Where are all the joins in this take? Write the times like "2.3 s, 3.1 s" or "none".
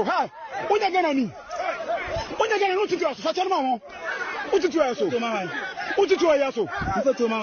none